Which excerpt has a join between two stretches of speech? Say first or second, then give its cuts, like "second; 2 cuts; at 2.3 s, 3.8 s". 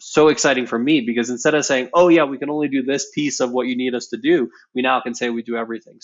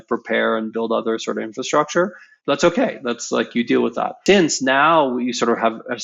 second; 2 cuts; at 2.3 s, 4.2 s